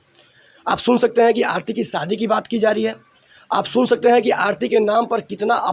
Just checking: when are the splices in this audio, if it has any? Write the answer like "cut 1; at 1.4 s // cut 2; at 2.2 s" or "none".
none